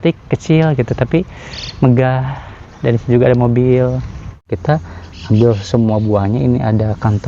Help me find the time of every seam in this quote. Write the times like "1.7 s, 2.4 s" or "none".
4.4 s